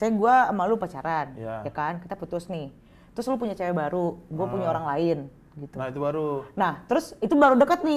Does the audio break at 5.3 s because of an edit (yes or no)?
no